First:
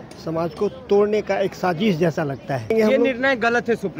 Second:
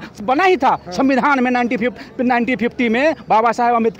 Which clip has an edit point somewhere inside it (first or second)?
first